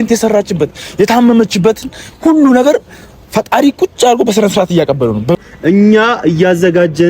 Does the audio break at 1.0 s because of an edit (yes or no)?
no